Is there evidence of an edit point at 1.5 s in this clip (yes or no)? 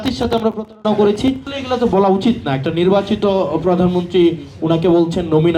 yes